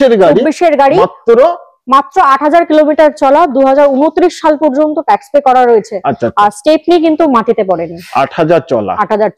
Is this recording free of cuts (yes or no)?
yes